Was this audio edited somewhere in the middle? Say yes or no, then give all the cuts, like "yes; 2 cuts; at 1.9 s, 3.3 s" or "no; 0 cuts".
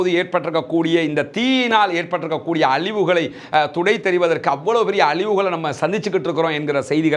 no; 0 cuts